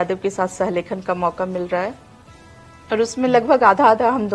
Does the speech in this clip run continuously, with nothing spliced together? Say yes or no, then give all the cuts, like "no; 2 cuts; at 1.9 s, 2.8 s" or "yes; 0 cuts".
yes; 0 cuts